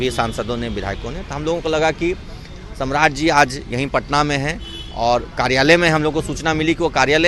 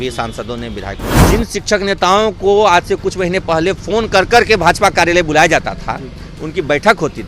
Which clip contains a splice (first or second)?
second